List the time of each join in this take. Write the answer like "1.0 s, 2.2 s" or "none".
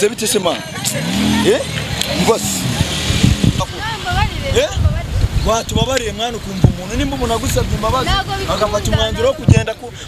3.6 s